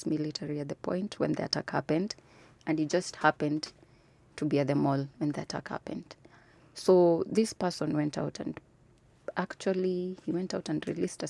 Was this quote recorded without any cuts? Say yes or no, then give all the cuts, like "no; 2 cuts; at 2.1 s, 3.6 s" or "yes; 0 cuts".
yes; 0 cuts